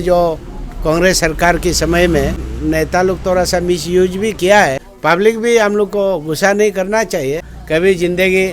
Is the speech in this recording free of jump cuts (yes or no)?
no